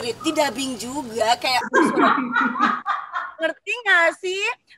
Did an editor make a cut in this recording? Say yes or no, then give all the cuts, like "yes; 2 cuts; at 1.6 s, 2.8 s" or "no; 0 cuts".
no; 0 cuts